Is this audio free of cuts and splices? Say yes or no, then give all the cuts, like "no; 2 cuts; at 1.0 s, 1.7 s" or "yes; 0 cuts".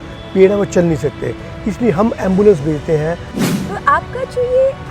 no; 1 cut; at 3.5 s